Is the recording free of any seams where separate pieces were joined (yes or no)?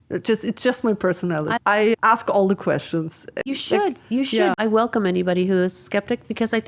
no